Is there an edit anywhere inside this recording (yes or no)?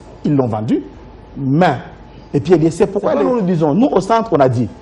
yes